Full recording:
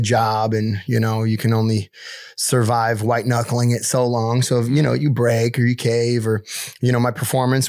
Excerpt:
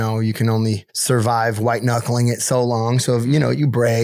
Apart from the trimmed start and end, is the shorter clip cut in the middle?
yes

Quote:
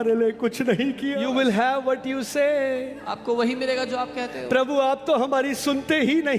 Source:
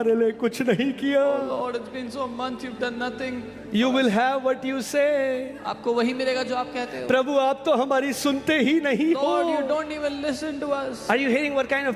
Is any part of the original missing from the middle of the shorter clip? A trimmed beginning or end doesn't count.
yes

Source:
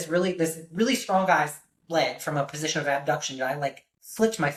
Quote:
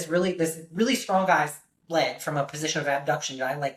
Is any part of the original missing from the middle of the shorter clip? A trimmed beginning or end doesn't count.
no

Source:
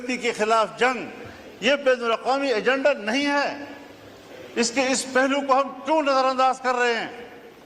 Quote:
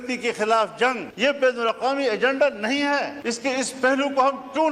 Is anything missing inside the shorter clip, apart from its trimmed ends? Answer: yes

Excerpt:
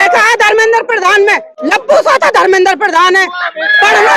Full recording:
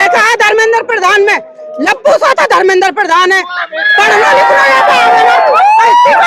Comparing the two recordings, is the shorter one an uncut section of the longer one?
no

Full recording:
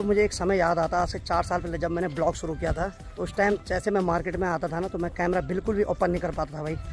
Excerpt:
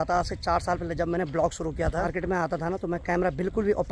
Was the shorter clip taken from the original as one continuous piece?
no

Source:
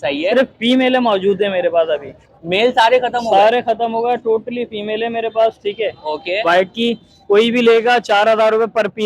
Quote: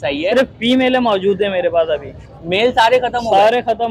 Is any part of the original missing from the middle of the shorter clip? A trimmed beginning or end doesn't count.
no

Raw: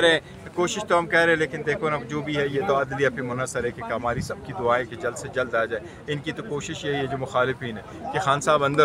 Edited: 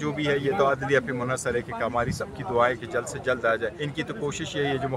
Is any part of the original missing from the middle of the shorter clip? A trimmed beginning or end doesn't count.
yes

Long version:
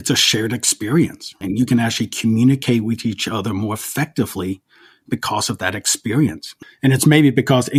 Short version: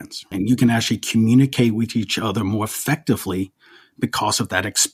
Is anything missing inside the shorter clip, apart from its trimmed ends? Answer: no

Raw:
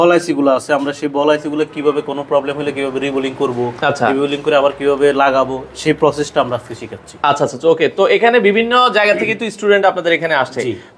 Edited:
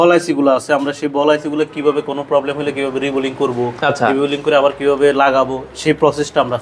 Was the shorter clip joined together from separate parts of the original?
no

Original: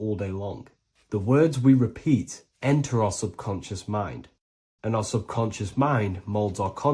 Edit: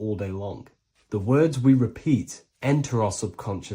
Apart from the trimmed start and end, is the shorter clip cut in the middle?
no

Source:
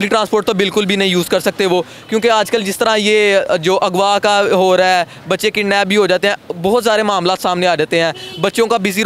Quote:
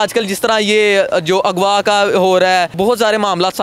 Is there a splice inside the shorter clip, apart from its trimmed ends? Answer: yes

